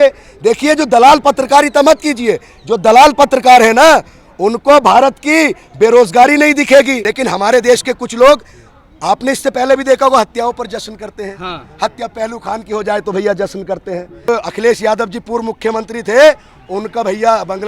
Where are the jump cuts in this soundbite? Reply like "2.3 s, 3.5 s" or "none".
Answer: 7.0 s, 14.3 s